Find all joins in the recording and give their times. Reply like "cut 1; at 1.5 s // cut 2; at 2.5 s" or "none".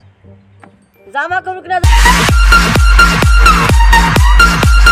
cut 1; at 1.9 s